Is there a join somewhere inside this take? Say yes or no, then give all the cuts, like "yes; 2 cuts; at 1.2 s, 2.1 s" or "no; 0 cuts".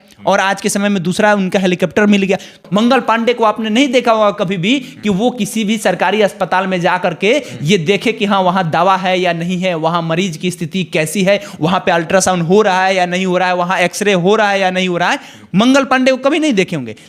yes; 1 cut; at 2.6 s